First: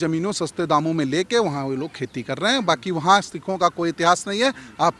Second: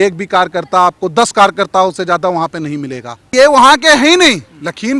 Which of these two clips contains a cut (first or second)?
second